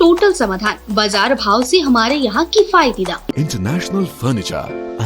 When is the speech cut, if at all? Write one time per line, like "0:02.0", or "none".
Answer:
0:03.3